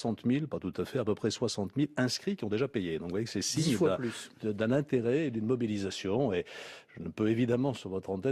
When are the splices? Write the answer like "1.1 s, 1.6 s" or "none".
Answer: 3.6 s